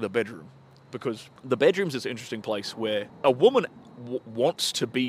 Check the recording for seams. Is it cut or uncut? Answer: cut